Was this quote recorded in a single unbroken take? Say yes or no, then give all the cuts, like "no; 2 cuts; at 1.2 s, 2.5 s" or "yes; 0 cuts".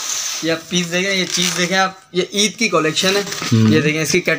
yes; 0 cuts